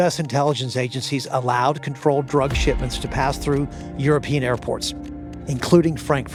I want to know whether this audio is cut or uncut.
uncut